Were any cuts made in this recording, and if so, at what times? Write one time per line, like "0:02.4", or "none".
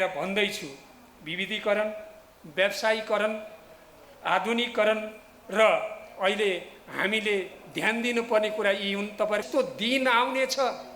0:09.5

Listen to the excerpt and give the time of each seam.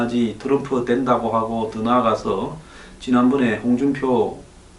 0:02.2

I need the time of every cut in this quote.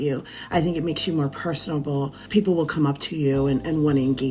0:02.2

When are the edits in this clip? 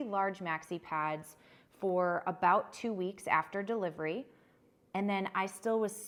none

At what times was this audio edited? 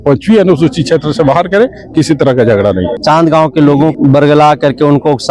0:03.0
0:03.9

